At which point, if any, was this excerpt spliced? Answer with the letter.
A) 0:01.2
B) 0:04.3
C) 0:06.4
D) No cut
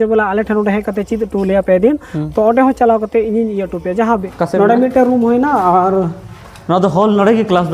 B